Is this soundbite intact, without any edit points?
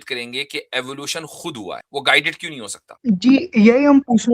no; 2 cuts; at 1.8 s, 2.8 s

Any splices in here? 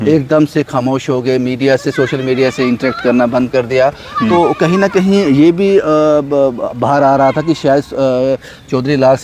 no; 0 cuts

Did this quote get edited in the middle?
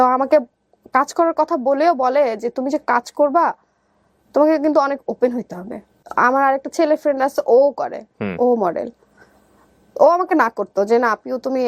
no; 0 cuts

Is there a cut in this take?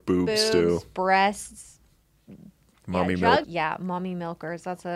yes; 1 cut; at 3.4 s

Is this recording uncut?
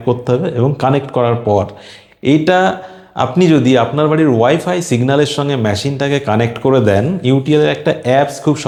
yes; 0 cuts

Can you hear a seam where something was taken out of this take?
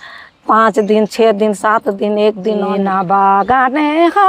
yes; 1 cut; at 2.7 s

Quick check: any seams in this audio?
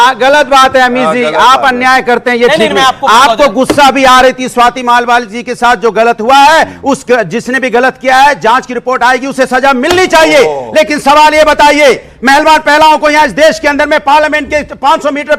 no; 0 cuts

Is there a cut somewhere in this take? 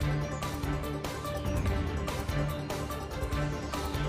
no; 0 cuts

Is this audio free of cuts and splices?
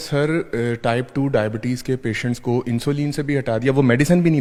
yes; 0 cuts

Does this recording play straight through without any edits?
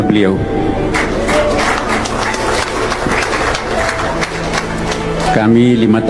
yes; 0 cuts

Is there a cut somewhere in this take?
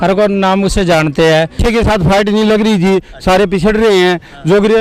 yes; 1 cut; at 1.6 s

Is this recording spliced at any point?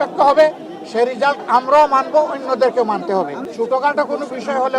yes; 1 cut; at 3.4 s

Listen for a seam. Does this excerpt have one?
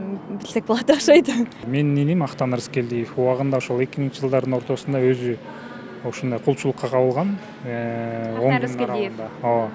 yes; 1 cut; at 1.6 s

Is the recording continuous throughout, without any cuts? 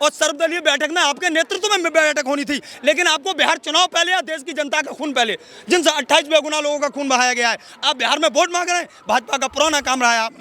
yes; 0 cuts

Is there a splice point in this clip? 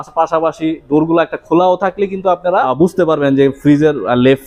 no; 0 cuts

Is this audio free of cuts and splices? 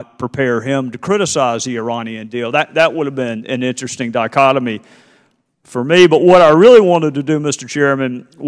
no; 1 cut; at 3.4 s

